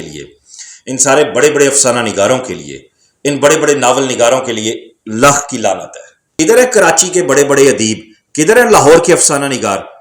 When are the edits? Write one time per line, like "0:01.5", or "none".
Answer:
0:06.2